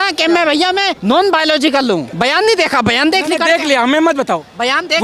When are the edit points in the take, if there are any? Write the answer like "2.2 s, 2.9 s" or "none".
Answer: 0.9 s, 2.1 s